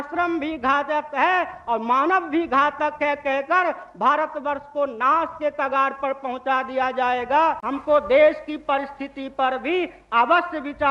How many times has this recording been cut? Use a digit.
1